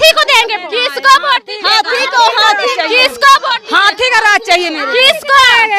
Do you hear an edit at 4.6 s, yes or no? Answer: no